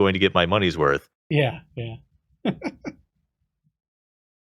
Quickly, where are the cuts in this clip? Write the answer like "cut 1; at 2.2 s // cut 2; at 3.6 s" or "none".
none